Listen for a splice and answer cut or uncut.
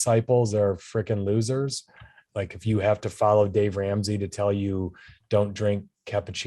cut